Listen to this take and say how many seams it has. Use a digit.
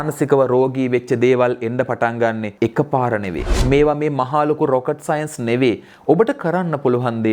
2